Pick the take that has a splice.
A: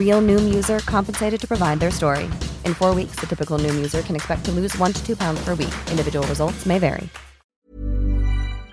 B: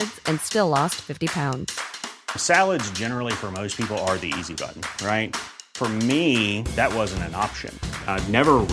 A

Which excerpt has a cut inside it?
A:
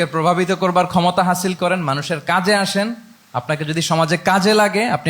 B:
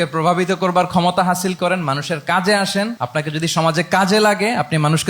B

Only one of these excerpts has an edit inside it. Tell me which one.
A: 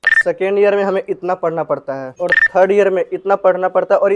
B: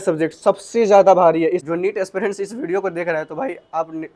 B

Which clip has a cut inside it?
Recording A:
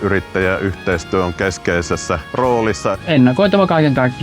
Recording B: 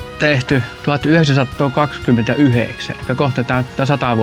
A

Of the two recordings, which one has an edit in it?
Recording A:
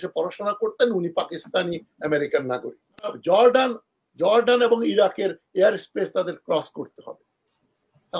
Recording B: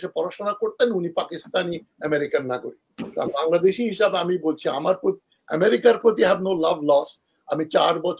A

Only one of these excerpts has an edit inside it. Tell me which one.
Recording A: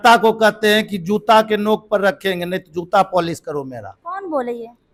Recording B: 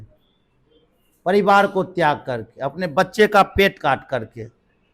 B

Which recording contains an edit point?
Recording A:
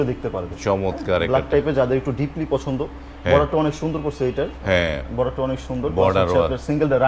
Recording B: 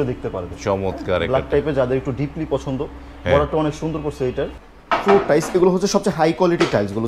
B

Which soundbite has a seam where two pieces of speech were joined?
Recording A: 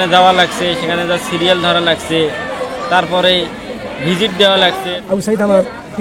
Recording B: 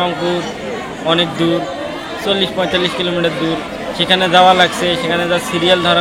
A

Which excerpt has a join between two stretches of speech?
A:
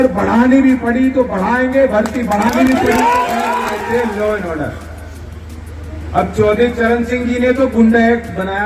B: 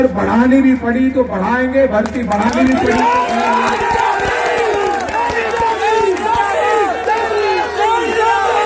A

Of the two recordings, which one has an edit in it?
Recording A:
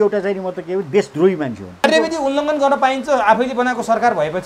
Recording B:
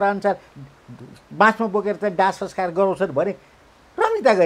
A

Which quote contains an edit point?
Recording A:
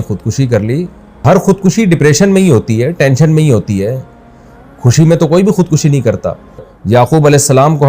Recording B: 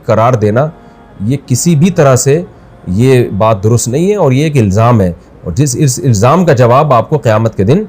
A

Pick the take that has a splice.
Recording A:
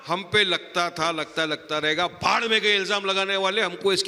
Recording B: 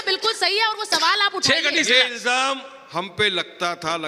B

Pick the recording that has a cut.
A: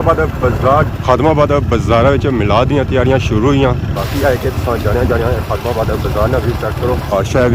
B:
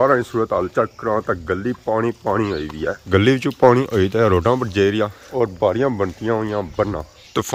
A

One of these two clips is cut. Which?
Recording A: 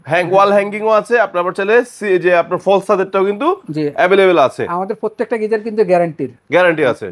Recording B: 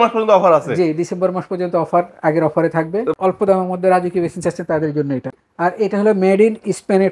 B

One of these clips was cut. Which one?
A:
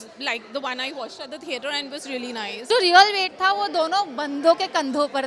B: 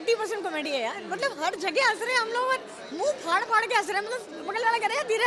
A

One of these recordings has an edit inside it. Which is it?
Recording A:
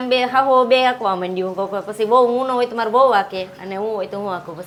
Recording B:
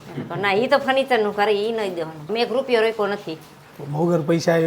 B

